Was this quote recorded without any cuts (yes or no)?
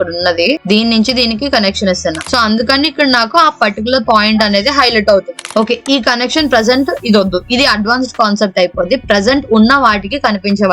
no